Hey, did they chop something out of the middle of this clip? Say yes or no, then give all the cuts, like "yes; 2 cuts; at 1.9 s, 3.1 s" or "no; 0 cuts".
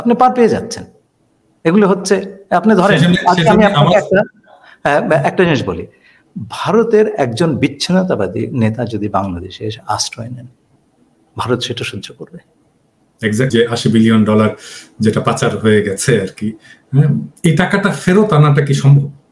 yes; 1 cut; at 13.8 s